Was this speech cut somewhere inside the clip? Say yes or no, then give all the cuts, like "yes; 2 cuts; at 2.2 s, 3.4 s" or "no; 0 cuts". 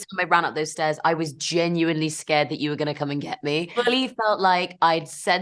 yes; 1 cut; at 3.7 s